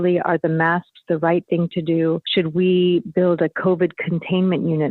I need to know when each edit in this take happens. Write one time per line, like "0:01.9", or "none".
0:02.2